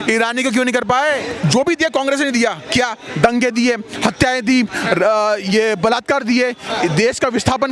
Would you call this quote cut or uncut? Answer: cut